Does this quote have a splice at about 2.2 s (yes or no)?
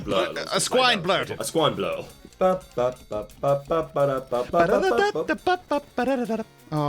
yes